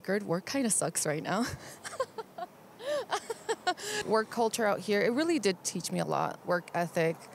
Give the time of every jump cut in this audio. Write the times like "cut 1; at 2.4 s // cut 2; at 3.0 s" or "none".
none